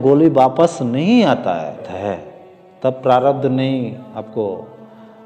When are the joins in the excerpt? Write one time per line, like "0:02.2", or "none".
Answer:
0:01.9